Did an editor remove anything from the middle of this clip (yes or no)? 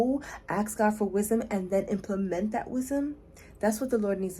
no